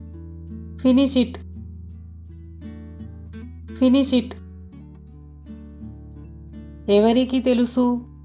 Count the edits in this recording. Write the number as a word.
four